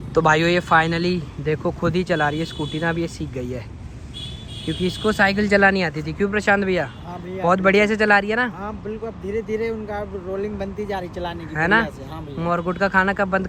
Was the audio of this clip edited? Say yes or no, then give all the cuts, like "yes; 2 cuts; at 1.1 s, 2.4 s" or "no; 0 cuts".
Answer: no; 0 cuts